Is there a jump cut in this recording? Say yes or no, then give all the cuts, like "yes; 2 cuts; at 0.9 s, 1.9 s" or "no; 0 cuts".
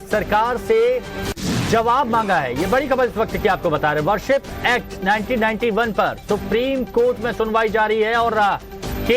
yes; 1 cut; at 3.1 s